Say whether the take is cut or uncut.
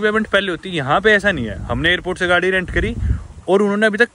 uncut